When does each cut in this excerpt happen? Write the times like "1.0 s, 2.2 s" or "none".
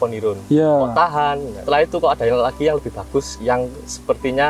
1.5 s, 3.3 s